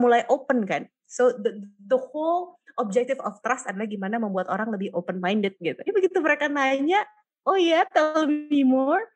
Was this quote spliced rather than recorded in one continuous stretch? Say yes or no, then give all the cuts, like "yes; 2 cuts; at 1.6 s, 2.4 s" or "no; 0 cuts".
no; 0 cuts